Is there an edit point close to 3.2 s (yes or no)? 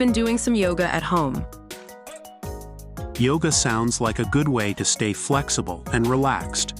yes